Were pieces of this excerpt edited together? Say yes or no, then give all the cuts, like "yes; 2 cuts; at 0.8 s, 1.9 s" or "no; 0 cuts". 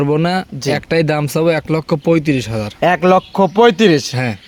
no; 0 cuts